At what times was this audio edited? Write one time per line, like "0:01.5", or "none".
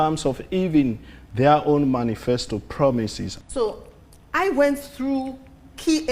0:03.3